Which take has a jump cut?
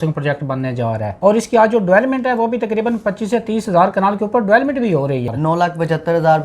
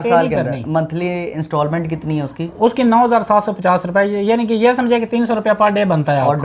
first; 2 cuts; at 1.1 s, 5.3 s

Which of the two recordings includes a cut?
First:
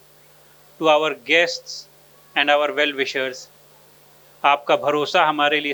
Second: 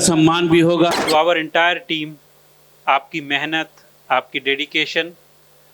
second; 1 cut; at 0.9 s

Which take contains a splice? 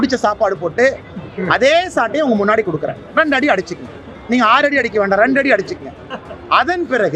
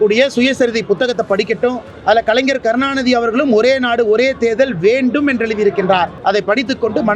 second; 2 cuts; at 1.9 s, 6.1 s

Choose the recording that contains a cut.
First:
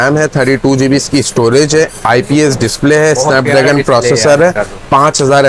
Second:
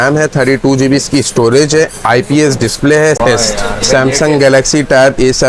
second; 1 cut; at 3.2 s

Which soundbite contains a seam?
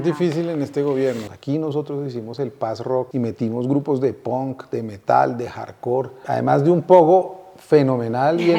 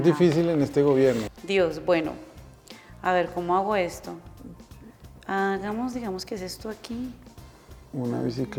first; 3 cuts; at 1.3 s, 3.1 s, 6.2 s

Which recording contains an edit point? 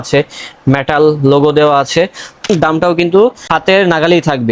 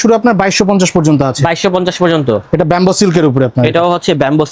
first; 2 cuts; at 2.5 s, 3.4 s

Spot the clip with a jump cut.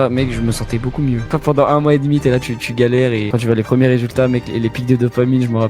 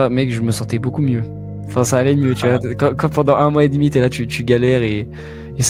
first; 2 cuts; at 1.3 s, 3.3 s

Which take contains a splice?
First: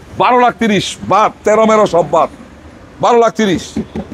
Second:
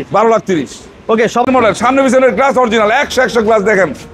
second; 1 cut; at 1.5 s

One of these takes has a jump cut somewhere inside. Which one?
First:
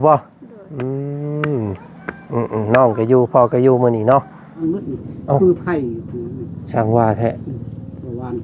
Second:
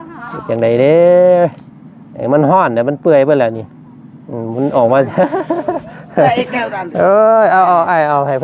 first; 1 cut; at 4.6 s

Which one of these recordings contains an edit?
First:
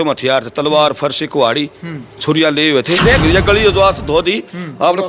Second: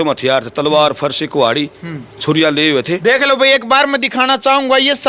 first; 1 cut; at 3.2 s

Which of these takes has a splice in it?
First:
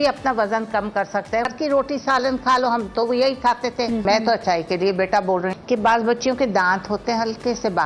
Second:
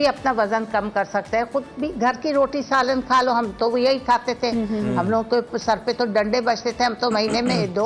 first; 3 cuts; at 1.5 s, 4.0 s, 5.5 s

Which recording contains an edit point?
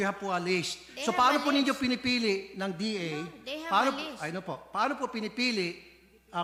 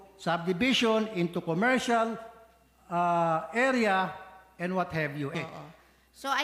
second; 1 cut; at 5.3 s

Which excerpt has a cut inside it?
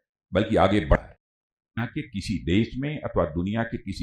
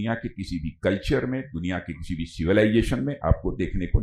first; 1 cut; at 1.6 s

